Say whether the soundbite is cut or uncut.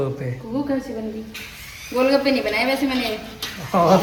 uncut